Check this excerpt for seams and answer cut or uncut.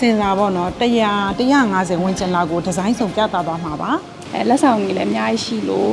cut